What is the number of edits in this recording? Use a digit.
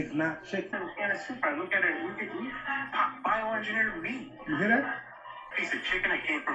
2